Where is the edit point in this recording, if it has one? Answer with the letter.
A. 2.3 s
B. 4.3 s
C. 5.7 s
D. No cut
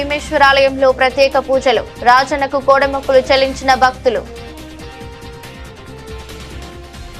B